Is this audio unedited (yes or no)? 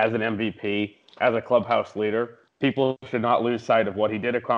no